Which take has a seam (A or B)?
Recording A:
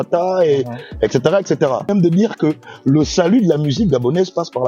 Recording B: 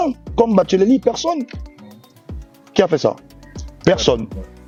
A